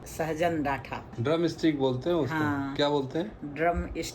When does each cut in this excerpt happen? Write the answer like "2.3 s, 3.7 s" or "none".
1.1 s